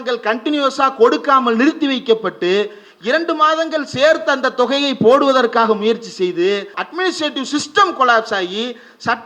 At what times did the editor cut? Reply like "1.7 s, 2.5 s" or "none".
6.8 s